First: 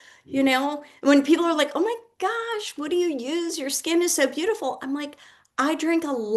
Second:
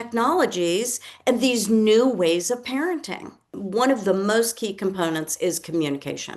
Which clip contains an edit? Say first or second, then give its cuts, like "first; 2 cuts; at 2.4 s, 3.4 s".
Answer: second; 1 cut; at 3.4 s